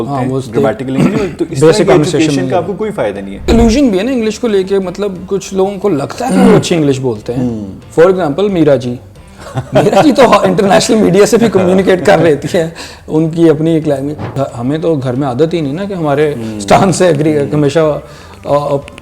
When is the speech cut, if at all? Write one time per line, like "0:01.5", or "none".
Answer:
0:03.4
0:14.2